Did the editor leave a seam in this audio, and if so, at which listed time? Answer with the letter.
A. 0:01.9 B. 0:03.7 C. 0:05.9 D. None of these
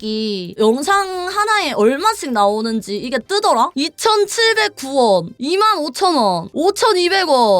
B